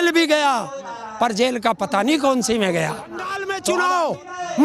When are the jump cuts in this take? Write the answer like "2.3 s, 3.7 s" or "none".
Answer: 3.5 s